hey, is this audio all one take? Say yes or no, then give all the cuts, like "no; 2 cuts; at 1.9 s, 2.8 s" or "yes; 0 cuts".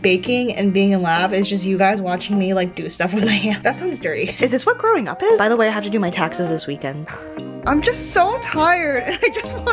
no; 2 cuts; at 4.3 s, 7.3 s